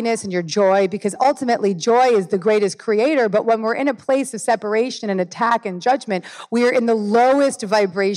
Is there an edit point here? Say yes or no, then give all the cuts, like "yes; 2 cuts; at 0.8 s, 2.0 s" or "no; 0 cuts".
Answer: no; 0 cuts